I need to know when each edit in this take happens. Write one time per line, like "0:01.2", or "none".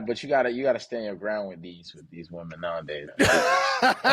0:03.1